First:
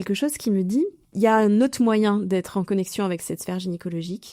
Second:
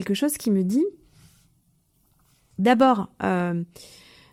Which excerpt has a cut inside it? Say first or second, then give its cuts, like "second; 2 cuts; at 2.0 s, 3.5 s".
first; 1 cut; at 1.0 s